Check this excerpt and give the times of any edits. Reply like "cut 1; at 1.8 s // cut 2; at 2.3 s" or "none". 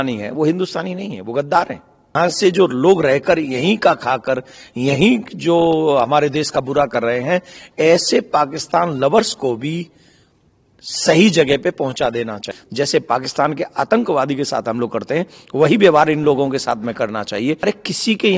cut 1; at 2.1 s // cut 2; at 12.6 s // cut 3; at 17.6 s